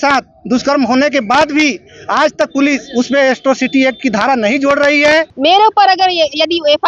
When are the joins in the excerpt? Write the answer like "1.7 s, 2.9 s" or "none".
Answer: 5.3 s